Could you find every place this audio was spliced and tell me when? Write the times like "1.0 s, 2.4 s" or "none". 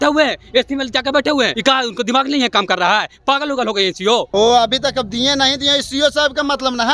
1.5 s, 4.3 s